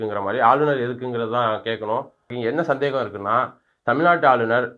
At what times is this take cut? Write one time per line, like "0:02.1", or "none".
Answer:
0:02.2